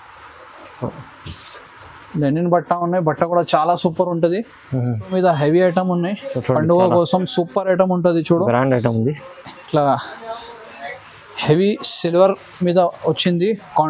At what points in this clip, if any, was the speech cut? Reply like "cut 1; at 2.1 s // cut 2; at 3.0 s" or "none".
cut 1; at 5.0 s